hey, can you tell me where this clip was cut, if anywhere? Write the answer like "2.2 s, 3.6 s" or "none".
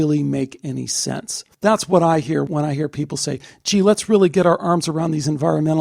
1.5 s, 2.5 s